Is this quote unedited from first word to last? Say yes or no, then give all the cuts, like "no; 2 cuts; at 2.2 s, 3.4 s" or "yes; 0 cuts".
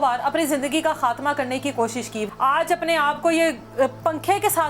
no; 1 cut; at 2.2 s